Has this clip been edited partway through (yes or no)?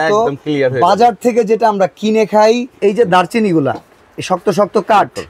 yes